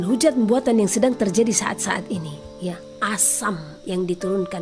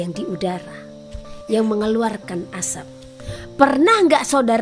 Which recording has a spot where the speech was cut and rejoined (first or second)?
second